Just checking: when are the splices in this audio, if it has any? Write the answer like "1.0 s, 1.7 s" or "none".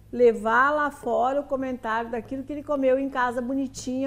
none